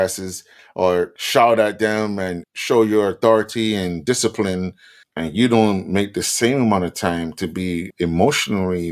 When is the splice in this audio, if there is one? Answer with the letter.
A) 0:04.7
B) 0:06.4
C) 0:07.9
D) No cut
C